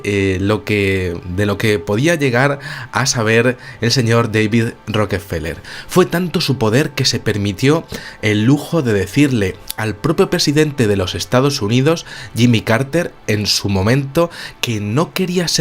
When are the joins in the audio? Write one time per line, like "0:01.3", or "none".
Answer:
0:14.3